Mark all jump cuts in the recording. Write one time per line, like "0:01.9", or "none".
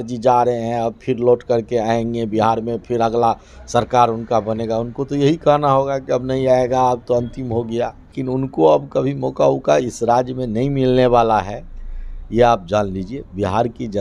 0:08.1